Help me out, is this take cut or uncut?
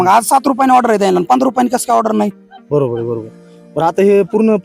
uncut